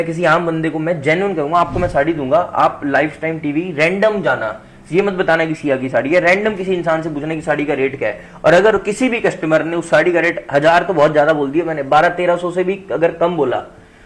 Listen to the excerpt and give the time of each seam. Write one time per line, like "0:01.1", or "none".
none